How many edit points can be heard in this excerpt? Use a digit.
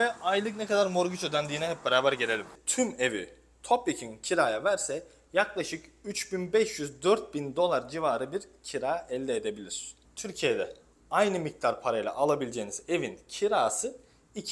1